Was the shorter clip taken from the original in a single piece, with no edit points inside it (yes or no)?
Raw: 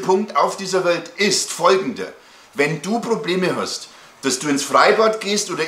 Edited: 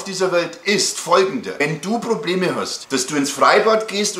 no